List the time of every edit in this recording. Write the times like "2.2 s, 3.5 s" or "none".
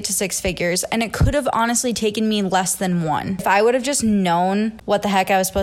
3.4 s, 4.8 s